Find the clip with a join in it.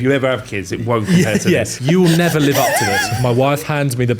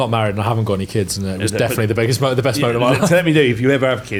first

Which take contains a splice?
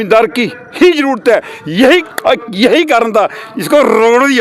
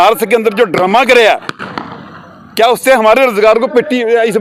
first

